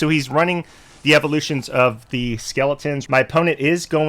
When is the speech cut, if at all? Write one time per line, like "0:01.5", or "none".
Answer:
0:03.0